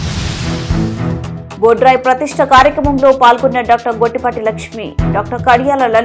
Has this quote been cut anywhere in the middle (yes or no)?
yes